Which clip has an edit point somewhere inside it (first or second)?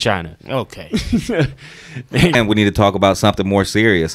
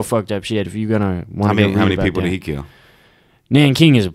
first